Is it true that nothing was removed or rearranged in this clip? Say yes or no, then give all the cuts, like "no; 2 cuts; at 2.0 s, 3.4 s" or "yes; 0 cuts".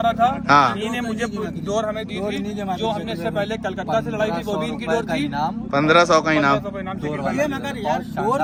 yes; 0 cuts